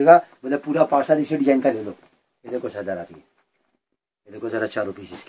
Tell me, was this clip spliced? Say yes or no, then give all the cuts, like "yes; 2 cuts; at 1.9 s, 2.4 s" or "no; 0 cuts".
no; 0 cuts